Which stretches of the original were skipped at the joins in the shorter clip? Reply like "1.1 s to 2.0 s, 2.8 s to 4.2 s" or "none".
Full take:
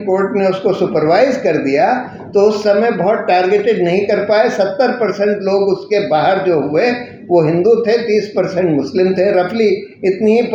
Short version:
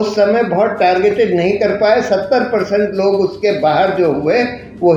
none